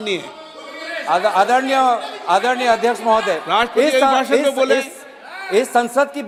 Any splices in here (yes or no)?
no